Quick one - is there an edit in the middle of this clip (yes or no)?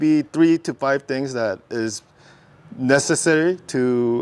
no